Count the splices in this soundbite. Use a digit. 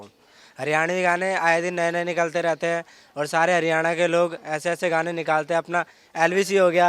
0